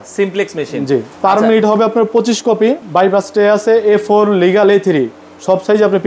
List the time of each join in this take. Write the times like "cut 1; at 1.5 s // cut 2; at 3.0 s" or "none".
cut 1; at 2.8 s